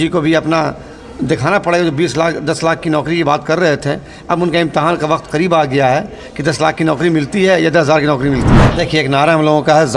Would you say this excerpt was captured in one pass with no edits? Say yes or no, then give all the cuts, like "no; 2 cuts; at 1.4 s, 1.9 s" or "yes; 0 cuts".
no; 1 cut; at 8.7 s